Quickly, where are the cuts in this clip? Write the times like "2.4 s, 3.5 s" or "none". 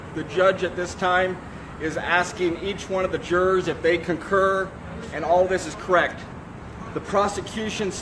2.7 s